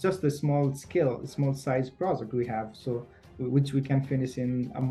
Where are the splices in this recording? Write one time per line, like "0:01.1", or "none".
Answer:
none

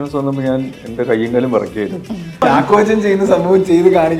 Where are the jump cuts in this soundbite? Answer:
0:02.4

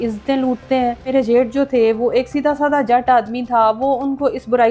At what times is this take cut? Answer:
0:01.1

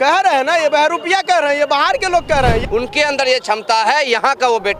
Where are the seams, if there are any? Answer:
0:02.6

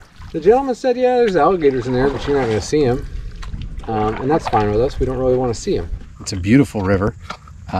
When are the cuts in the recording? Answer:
0:05.9

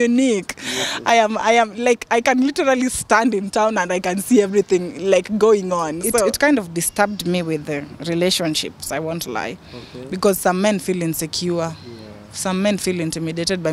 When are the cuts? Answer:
0:06.3

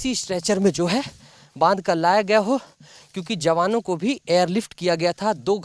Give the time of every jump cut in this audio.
none

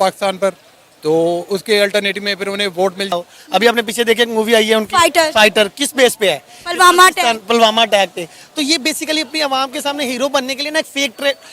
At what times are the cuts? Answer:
0:03.1

